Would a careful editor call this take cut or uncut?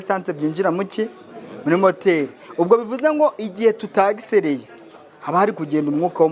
uncut